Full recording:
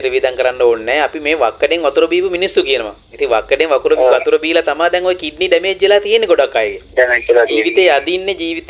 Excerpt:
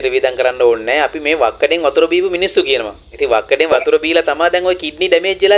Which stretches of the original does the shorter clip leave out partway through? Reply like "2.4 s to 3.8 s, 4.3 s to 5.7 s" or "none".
3.7 s to 4.1 s